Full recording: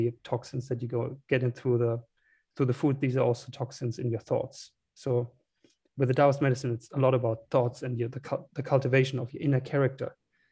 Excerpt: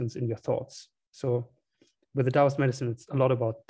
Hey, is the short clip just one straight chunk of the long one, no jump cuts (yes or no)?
yes